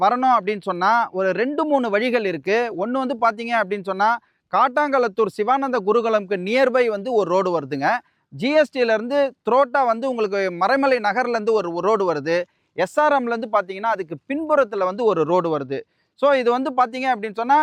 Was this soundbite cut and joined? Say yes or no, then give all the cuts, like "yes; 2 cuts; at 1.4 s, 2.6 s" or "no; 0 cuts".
no; 0 cuts